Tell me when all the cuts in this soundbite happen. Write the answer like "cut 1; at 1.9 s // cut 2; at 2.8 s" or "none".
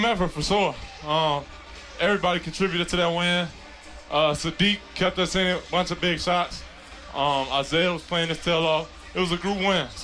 none

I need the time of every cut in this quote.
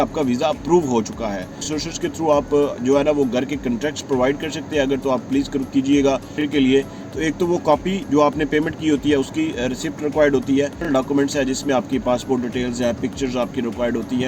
cut 1; at 1.7 s // cut 2; at 6.4 s // cut 3; at 10.8 s

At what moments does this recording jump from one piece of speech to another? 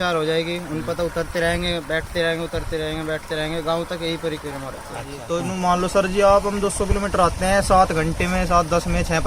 cut 1; at 5.2 s

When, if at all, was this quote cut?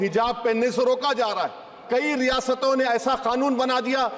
cut 1; at 1.8 s

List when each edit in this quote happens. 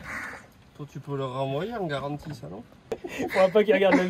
cut 1; at 3.0 s

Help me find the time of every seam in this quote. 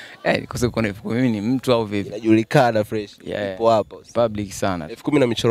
none

